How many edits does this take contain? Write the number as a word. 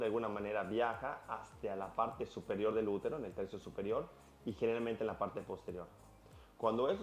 one